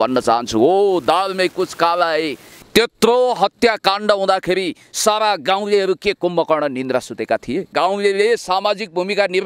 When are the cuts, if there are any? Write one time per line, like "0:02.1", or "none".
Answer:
0:02.5
0:07.7